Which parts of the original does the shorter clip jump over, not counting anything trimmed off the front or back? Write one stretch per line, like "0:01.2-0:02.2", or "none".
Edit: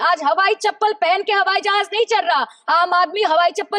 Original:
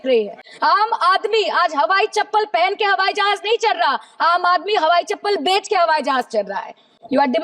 none